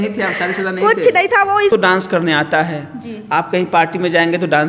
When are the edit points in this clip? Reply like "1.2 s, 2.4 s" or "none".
1.7 s